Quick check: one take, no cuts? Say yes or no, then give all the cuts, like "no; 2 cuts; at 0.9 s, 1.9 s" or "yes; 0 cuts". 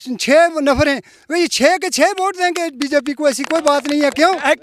yes; 0 cuts